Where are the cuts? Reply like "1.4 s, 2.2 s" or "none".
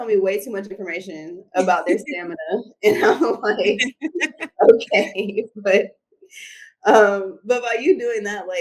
none